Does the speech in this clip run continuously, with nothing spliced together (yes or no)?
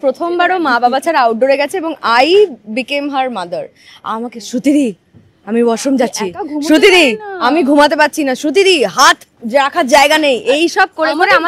yes